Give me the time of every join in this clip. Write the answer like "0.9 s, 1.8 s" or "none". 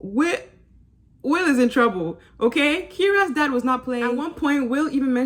4.1 s

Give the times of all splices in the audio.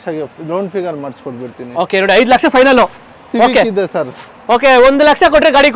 none

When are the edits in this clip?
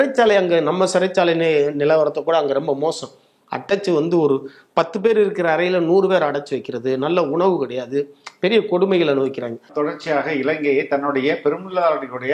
9.7 s

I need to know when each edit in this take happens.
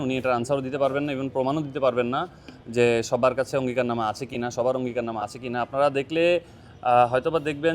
none

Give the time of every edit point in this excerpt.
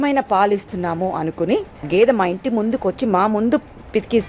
1.9 s

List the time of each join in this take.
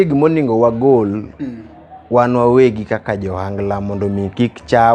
none

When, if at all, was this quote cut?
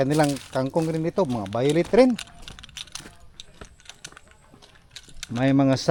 none

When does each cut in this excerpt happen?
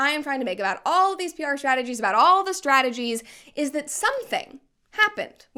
none

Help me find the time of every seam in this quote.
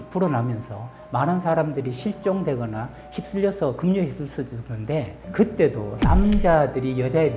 5.9 s

